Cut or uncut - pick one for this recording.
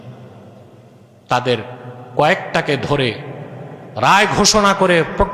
uncut